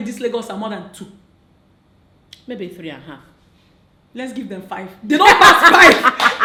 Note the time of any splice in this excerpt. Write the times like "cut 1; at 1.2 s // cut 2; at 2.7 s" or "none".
none